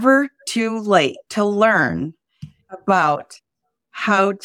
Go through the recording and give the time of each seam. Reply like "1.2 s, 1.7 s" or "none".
1.2 s